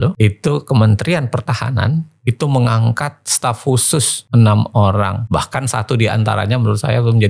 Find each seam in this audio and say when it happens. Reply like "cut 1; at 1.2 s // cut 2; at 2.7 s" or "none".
none